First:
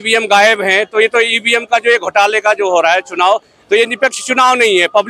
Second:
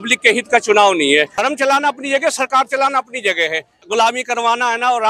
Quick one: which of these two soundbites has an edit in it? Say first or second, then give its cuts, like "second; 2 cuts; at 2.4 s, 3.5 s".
second; 2 cuts; at 1.3 s, 3.7 s